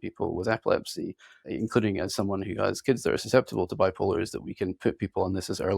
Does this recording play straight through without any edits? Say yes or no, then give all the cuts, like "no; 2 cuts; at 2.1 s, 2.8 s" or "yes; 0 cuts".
no; 1 cut; at 1.4 s